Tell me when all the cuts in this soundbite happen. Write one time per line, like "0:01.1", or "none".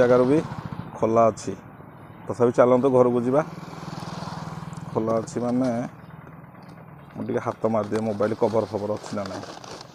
none